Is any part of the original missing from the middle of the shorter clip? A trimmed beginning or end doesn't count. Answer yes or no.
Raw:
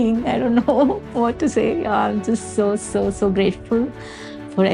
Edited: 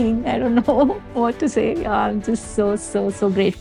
no